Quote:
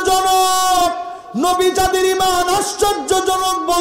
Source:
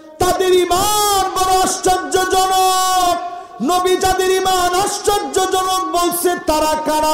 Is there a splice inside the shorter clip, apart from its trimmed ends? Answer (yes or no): no